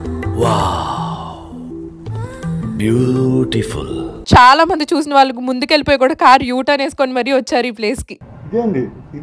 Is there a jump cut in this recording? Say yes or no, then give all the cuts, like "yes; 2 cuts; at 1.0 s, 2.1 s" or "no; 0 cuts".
yes; 1 cut; at 4.2 s